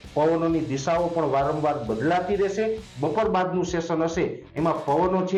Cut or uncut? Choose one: uncut